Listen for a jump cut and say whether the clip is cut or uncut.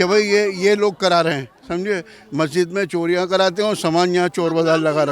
uncut